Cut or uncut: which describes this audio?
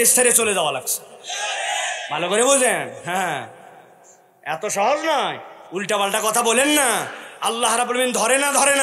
uncut